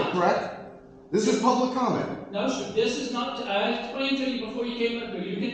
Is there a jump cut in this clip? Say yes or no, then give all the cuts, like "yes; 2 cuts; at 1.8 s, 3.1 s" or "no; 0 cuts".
no; 0 cuts